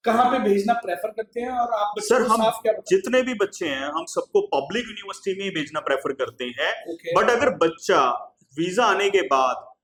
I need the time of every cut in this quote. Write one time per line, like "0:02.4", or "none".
none